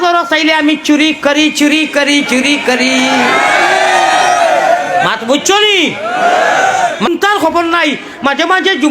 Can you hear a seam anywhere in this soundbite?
yes; 1 cut; at 7.1 s

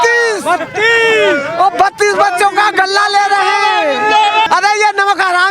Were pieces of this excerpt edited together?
yes; 1 cut; at 4.5 s

